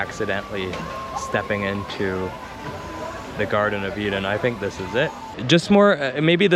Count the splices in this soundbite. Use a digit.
1